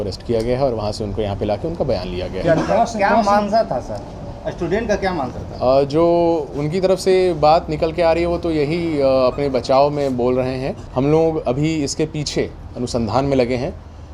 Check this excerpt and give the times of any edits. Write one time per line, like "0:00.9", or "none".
0:10.8